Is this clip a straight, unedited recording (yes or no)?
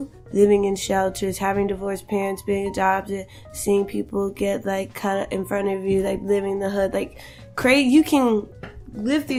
yes